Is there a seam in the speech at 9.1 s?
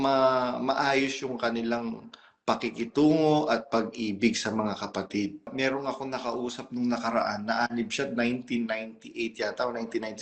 no; 1 cut; at 5.5 s

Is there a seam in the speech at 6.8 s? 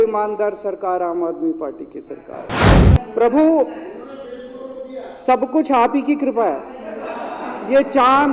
no; 1 cut; at 2.6 s

